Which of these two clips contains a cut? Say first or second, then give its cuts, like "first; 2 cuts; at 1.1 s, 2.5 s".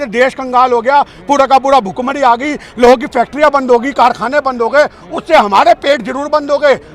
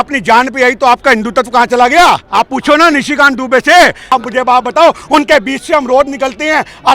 second; 2 cuts; at 2.3 s, 4.1 s